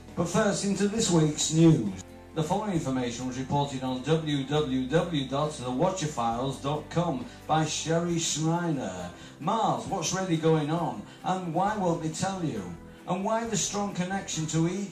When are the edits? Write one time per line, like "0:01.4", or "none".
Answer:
0:08.4